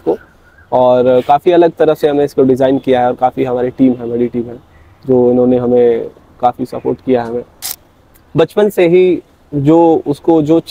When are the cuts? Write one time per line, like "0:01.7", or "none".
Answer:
0:07.8